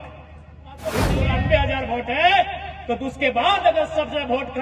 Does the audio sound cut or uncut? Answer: cut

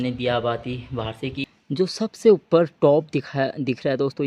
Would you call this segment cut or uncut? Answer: cut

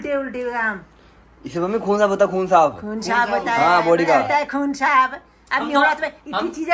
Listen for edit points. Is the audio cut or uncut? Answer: uncut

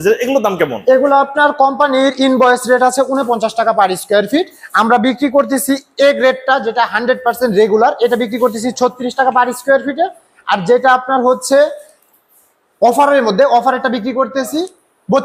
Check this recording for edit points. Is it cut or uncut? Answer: uncut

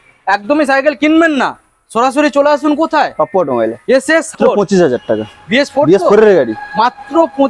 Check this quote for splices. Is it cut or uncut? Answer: cut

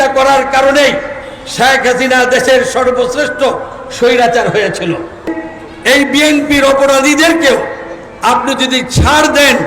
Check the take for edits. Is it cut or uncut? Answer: cut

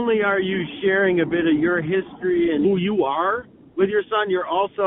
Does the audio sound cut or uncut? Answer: uncut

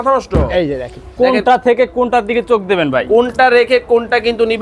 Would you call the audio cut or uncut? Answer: uncut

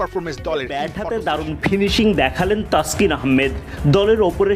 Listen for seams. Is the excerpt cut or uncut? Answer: cut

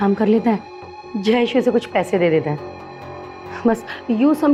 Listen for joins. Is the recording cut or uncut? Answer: uncut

